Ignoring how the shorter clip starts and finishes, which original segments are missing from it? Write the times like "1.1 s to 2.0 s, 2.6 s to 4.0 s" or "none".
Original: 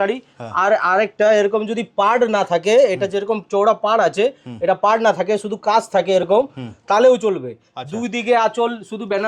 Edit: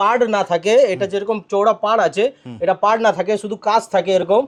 none